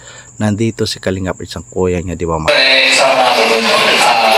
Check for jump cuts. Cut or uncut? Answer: cut